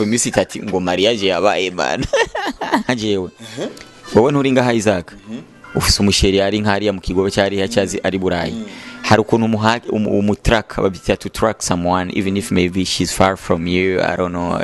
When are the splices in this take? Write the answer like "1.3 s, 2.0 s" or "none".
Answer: 2.9 s